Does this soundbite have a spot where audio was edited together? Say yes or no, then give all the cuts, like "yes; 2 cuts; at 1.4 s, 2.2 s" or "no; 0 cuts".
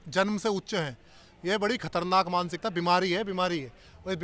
no; 0 cuts